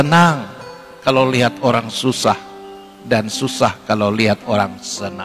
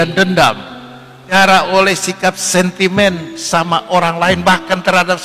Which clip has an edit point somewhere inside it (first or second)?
second